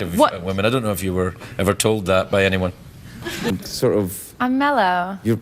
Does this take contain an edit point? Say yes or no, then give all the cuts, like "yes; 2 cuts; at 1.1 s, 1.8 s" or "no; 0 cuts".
yes; 1 cut; at 3.5 s